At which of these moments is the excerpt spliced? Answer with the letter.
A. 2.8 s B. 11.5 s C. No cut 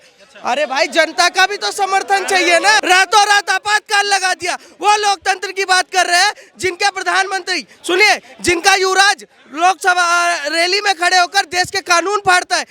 A